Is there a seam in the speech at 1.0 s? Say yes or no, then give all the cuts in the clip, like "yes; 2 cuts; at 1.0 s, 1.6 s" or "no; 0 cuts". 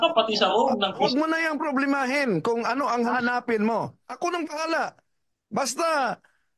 yes; 3 cuts; at 1.0 s, 3.1 s, 4.0 s